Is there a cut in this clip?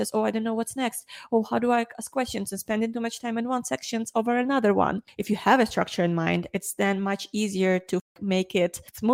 no; 0 cuts

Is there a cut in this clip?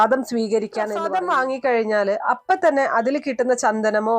yes; 1 cut; at 1.0 s

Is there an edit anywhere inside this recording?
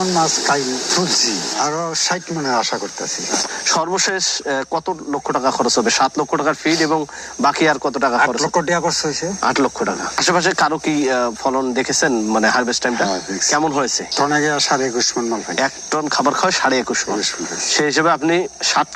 yes; 1 cut; at 3.4 s

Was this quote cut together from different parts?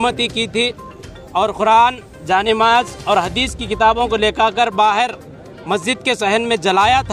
no; 0 cuts

